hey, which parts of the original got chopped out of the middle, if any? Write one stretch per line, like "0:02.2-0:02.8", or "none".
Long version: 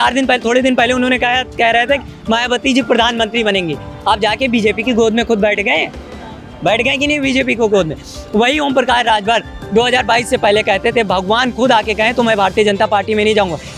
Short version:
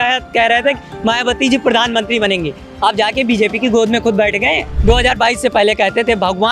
0:05.9-0:09.6